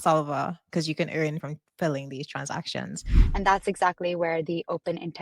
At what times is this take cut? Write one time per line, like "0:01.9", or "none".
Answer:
0:01.4
0:03.1